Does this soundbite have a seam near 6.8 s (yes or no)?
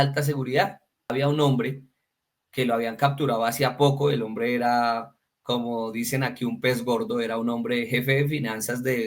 no